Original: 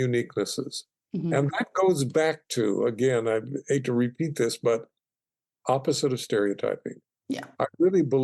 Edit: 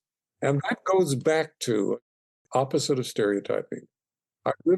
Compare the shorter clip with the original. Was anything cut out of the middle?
yes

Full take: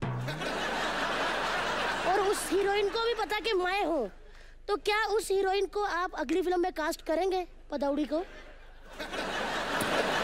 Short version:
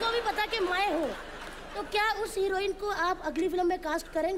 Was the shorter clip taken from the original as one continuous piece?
yes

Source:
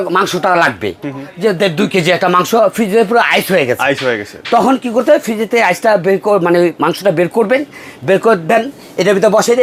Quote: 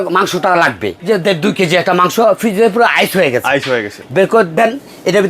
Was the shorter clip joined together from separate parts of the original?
yes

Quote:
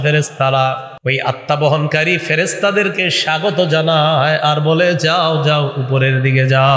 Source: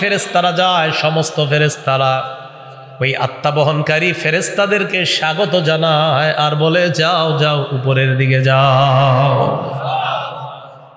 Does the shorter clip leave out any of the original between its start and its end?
yes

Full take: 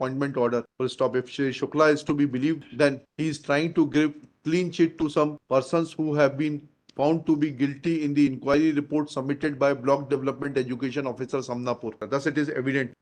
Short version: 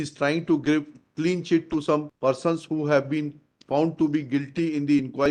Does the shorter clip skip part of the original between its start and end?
no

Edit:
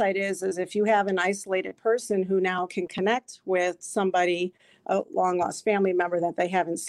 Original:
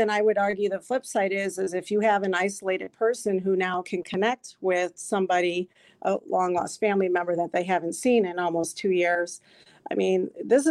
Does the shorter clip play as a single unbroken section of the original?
yes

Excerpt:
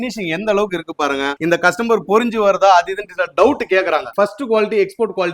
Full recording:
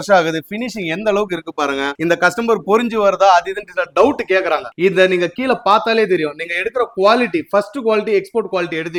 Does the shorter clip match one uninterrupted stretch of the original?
no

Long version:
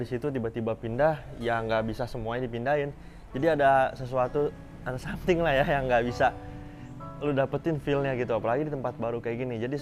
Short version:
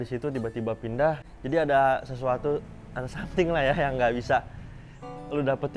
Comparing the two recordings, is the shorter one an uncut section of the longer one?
no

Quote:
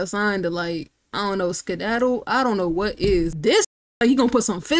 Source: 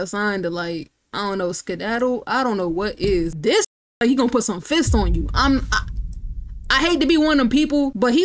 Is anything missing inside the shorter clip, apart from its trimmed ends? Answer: no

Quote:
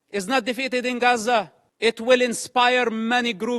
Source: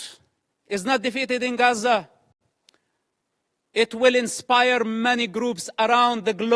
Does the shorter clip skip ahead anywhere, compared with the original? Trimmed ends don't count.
yes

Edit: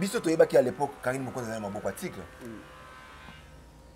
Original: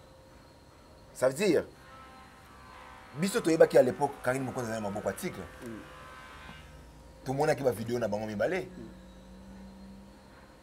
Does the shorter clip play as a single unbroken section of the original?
yes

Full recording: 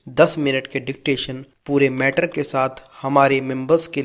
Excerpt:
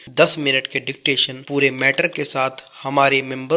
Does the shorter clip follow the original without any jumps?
no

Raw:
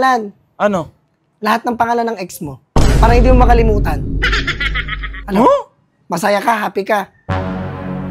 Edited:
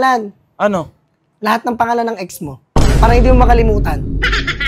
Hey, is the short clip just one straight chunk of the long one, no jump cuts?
yes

